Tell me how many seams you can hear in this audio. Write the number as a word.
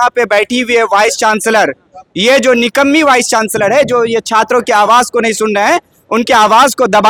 zero